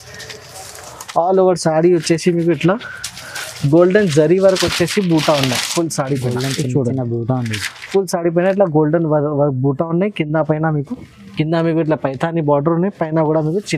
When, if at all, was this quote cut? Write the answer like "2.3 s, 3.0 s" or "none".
none

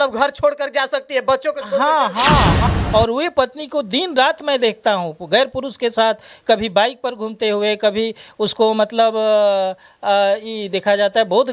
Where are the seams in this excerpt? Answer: 2.7 s

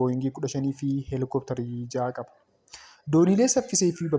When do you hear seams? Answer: none

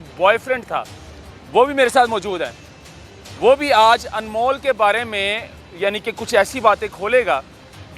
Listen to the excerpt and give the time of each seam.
none

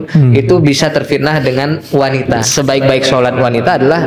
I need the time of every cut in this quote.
2.4 s

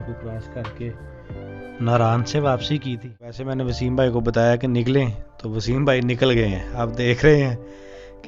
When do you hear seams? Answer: 3.4 s

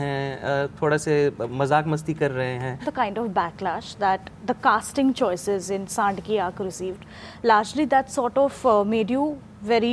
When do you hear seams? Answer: 2.9 s

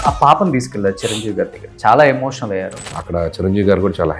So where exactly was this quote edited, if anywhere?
1.6 s, 2.9 s

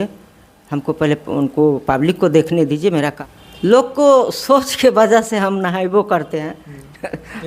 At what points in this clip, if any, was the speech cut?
3.2 s

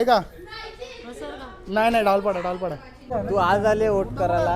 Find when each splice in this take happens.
3.0 s

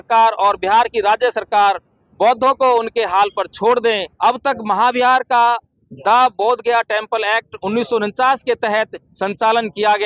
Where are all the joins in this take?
4.1 s

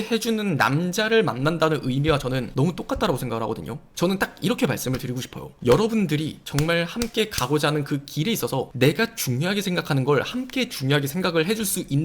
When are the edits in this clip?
3.9 s

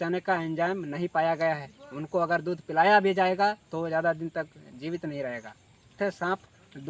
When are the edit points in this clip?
6.0 s

